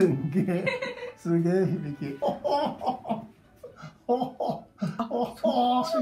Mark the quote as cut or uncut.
cut